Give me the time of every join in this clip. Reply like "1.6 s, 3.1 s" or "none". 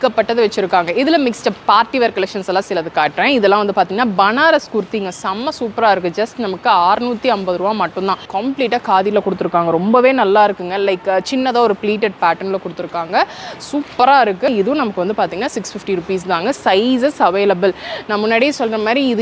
8.3 s, 14.5 s